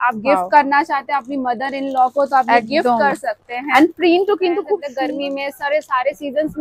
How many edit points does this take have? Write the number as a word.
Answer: one